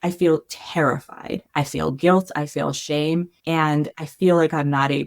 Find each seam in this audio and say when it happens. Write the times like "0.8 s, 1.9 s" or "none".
1.4 s, 3.3 s